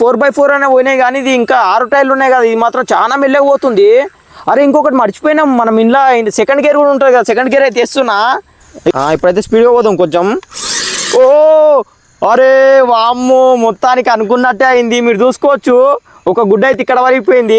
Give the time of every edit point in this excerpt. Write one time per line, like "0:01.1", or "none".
0:08.9